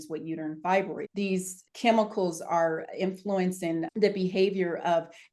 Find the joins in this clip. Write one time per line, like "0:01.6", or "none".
0:01.6